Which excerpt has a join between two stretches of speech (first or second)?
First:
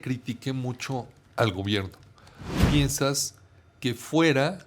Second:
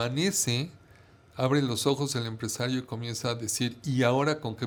first